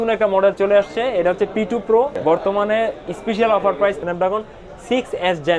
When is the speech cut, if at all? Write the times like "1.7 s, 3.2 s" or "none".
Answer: 2.2 s, 4.0 s